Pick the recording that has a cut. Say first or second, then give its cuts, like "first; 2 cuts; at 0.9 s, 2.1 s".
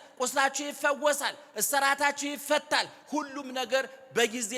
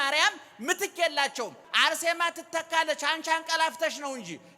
second; 1 cut; at 1.6 s